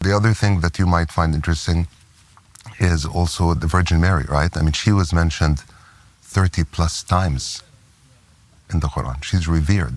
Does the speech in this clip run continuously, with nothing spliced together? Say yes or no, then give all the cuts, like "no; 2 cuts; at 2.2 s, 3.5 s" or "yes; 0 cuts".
yes; 0 cuts